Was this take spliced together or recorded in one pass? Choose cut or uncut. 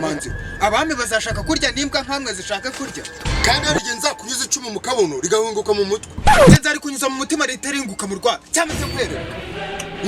uncut